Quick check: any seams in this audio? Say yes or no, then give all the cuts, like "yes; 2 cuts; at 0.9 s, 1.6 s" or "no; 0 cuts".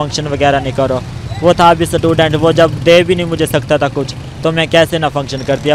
no; 0 cuts